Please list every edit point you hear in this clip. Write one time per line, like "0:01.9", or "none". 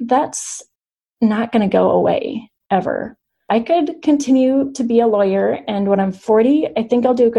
0:03.5